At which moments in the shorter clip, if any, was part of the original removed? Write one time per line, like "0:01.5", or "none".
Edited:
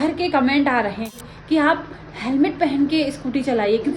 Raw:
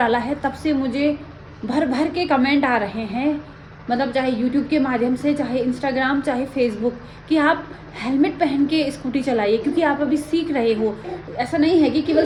0:01.2